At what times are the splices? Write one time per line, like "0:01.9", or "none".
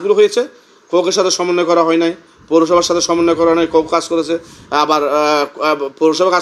none